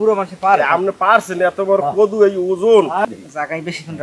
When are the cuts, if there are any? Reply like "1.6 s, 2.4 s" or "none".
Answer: 3.1 s